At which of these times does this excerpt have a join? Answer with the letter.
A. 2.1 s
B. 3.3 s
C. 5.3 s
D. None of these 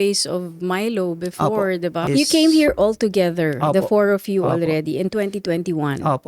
A